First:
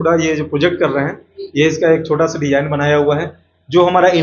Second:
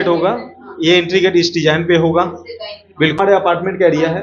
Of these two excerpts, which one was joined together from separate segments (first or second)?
second